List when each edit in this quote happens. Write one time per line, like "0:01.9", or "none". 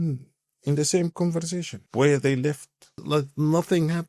0:01.8
0:03.0